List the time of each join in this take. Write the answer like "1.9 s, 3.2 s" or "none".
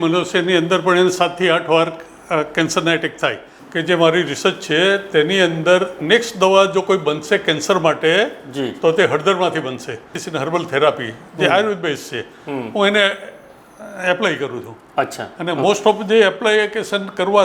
3.6 s, 10.2 s